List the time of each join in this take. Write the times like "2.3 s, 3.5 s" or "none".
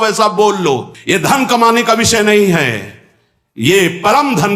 0.9 s